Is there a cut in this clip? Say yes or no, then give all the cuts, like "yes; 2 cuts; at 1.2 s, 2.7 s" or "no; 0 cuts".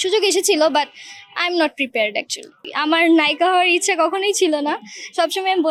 no; 0 cuts